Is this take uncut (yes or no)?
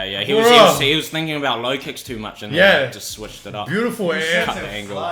yes